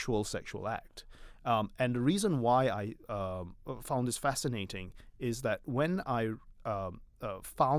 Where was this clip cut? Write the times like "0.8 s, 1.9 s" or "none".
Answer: none